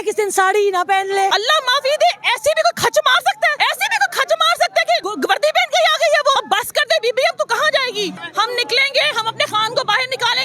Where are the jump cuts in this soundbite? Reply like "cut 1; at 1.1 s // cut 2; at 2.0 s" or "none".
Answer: cut 1; at 1.3 s // cut 2; at 3.5 s // cut 3; at 5.1 s // cut 4; at 6.4 s // cut 5; at 8.2 s